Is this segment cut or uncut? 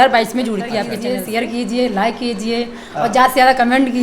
cut